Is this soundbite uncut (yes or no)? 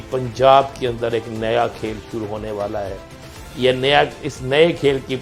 yes